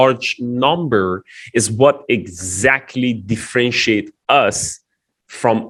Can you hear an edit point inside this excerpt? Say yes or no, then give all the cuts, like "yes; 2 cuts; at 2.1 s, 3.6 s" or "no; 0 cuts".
no; 0 cuts